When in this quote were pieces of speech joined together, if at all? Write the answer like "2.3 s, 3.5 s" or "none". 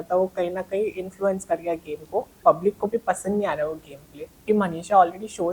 2.4 s, 4.4 s